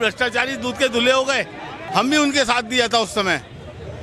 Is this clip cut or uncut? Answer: cut